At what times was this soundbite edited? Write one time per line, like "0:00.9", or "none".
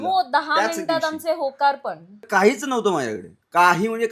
0:02.3